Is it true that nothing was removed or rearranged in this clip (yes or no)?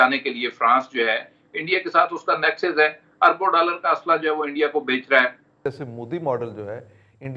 no